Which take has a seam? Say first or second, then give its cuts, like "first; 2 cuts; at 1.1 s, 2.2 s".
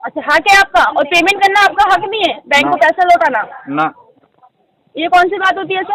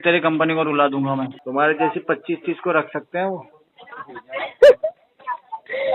second; 1 cut; at 1.4 s